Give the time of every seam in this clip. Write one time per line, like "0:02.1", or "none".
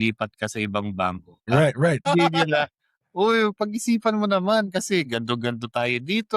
0:01.3
0:02.0